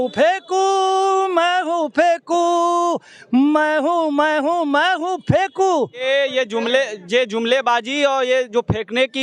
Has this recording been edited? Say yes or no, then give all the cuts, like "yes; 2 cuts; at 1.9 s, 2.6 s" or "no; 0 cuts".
yes; 1 cut; at 6.0 s